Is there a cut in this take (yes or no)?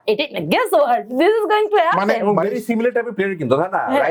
no